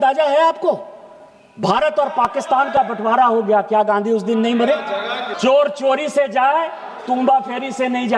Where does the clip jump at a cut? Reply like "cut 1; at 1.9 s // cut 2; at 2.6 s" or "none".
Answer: cut 1; at 5.3 s